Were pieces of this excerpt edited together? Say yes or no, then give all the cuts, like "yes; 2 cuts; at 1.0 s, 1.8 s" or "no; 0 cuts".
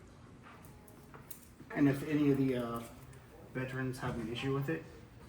yes; 1 cut; at 1.7 s